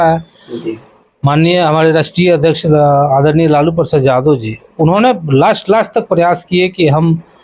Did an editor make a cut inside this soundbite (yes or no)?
no